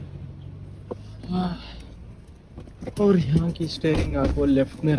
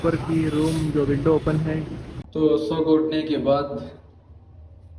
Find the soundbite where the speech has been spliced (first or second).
second